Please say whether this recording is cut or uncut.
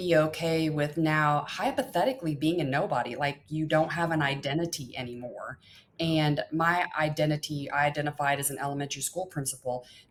uncut